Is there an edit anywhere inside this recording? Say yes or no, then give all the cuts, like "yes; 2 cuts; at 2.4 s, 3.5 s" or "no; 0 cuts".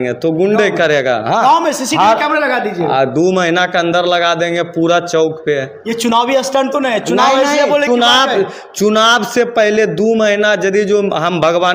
no; 0 cuts